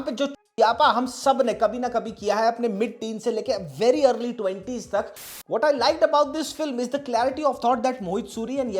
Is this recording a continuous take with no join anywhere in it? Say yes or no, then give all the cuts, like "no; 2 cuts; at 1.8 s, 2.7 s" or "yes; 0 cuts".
no; 1 cut; at 5.3 s